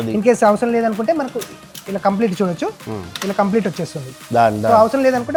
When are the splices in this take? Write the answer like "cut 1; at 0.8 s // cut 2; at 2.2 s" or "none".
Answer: none